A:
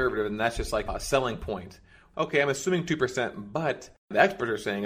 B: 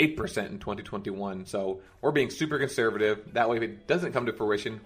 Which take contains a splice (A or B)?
A